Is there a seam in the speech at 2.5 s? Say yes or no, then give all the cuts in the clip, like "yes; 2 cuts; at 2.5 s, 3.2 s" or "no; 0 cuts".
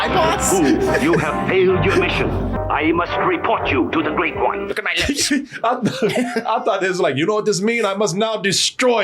yes; 1 cut; at 2.5 s